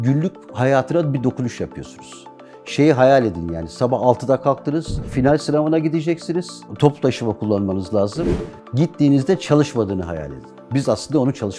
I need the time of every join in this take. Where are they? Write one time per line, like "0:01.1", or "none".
0:05.1
0:06.6